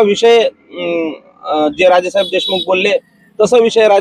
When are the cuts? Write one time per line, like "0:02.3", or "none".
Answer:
none